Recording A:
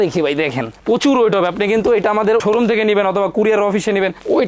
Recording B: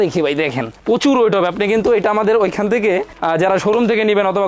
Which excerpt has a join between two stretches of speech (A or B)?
A